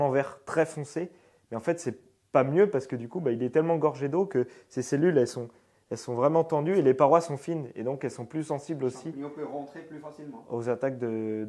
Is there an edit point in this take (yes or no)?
no